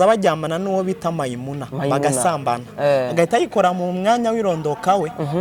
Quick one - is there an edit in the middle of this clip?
no; 0 cuts

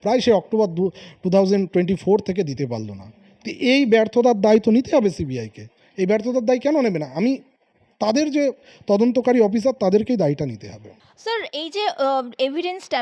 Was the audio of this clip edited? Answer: no; 0 cuts

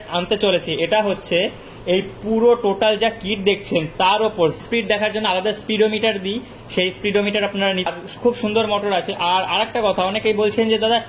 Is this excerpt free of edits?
no; 2 cuts; at 4.6 s, 7.9 s

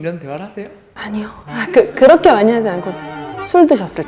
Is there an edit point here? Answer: no; 0 cuts

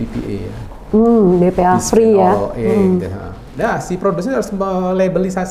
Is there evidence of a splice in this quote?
no; 0 cuts

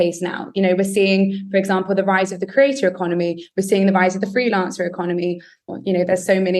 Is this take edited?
yes; 1 cut; at 5.7 s

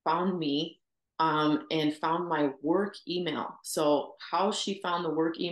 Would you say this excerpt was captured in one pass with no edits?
yes; 0 cuts

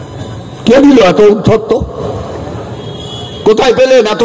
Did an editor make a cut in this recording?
no; 0 cuts

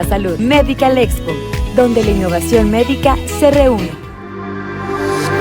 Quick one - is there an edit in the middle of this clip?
yes; 1 cut; at 3.8 s

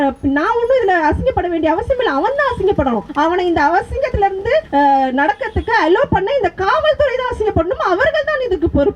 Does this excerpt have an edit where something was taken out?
yes; 2 cuts; at 3.1 s, 4.7 s

